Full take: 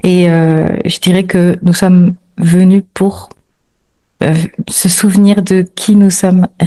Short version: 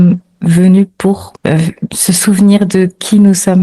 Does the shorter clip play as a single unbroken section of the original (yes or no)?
no